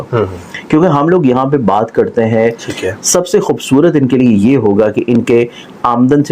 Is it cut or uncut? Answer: cut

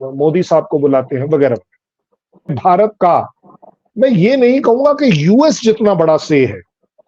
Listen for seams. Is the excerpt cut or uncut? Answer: cut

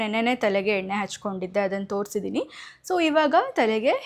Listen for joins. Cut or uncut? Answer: uncut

